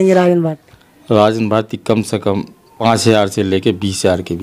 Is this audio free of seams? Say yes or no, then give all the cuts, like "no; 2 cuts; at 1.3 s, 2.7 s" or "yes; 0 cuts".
no; 1 cut; at 2.8 s